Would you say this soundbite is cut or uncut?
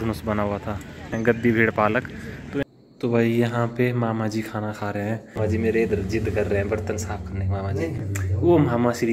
cut